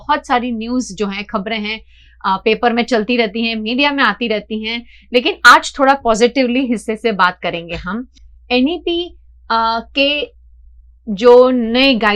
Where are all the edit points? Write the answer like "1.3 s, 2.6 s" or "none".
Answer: none